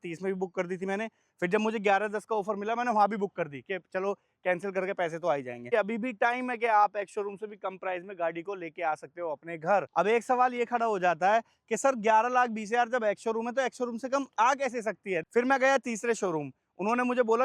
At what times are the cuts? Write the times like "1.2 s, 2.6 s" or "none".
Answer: 5.6 s, 9.9 s, 15.2 s